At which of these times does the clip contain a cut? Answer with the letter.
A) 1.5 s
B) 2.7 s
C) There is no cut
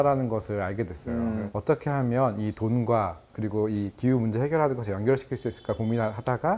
A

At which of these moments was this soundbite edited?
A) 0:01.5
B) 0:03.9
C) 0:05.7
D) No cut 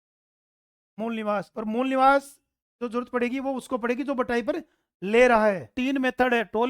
C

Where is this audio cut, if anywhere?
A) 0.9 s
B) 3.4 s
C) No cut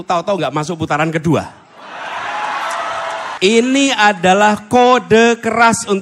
B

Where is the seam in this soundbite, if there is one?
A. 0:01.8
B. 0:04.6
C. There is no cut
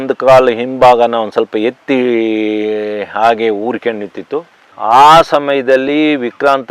B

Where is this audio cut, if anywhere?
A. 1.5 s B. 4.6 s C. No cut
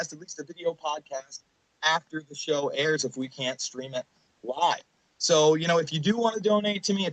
B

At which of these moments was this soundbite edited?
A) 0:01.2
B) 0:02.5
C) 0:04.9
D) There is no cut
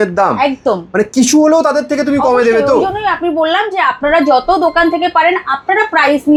D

